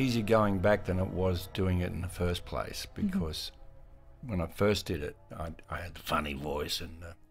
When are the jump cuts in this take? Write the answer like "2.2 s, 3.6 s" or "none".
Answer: 3.9 s